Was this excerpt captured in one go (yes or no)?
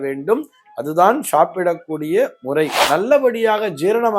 no